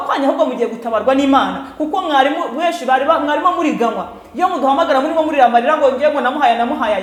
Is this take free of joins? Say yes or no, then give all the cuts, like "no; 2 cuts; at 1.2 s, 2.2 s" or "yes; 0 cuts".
yes; 0 cuts